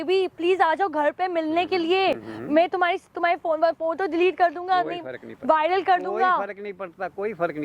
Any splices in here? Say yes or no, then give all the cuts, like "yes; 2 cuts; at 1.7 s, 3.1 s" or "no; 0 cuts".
no; 0 cuts